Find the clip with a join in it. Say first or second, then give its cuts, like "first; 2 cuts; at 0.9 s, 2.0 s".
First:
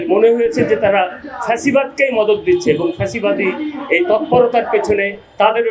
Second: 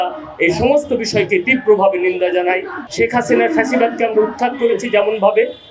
second; 1 cut; at 2.8 s